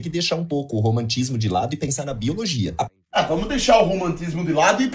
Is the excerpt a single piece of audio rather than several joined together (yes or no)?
yes